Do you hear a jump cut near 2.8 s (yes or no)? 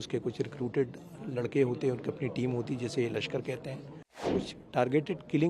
no